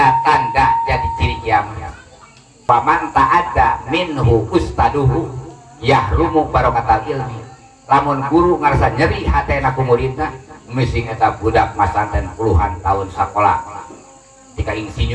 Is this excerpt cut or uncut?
cut